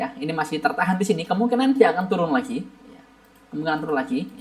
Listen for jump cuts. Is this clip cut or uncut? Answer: uncut